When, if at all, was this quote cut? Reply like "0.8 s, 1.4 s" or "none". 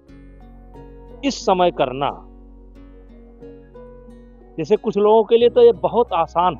none